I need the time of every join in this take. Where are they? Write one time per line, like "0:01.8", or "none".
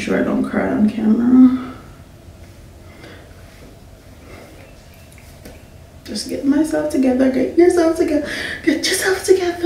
none